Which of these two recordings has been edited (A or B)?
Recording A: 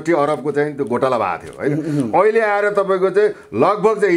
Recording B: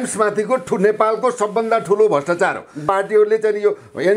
B